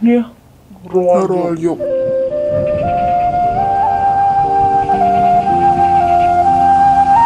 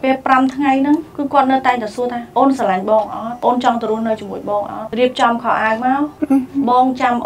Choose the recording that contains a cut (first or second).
second